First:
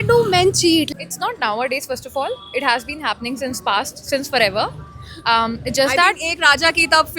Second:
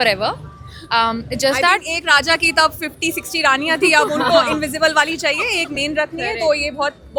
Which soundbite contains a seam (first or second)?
first